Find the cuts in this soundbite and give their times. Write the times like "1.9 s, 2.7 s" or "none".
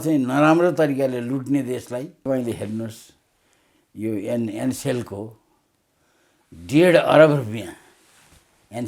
2.3 s